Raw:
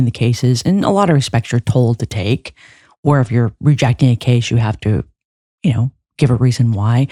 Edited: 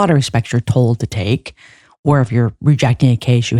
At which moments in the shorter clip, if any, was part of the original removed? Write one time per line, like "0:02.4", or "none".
none